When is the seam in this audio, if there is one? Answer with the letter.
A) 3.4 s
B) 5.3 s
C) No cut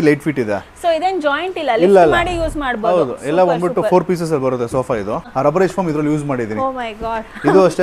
B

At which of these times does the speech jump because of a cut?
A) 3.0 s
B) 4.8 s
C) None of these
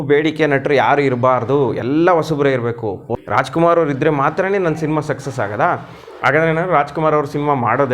A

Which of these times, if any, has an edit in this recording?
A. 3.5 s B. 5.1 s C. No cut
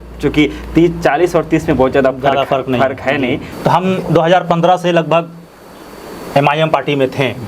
A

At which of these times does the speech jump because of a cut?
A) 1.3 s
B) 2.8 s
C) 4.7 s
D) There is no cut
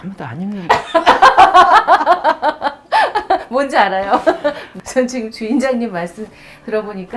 C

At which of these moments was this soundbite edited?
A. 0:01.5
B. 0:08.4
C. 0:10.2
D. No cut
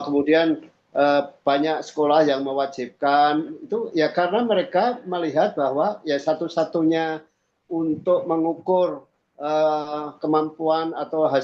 D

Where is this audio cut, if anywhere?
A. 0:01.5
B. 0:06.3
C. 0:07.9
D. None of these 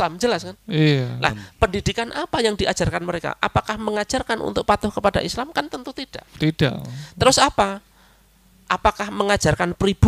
D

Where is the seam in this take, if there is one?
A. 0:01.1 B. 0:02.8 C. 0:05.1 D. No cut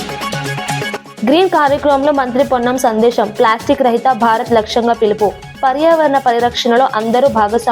A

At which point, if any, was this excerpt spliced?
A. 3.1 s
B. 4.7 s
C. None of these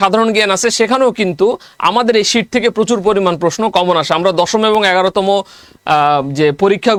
C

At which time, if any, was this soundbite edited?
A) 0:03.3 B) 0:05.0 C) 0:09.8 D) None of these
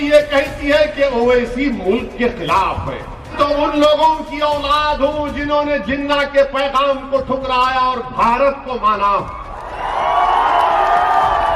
A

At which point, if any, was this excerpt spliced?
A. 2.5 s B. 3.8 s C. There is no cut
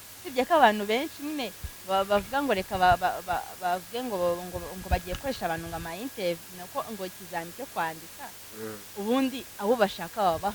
C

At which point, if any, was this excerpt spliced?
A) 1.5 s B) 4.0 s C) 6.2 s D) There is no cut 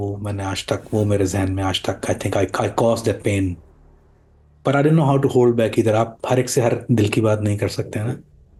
D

